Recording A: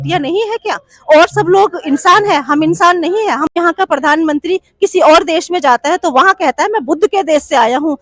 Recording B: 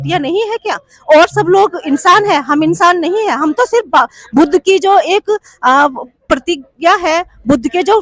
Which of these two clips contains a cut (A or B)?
A